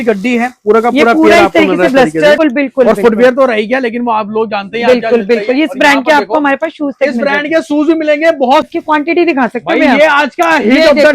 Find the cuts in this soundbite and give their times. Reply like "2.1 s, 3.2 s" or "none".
2.4 s, 8.6 s